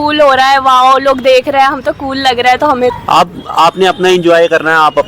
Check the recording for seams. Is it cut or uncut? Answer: cut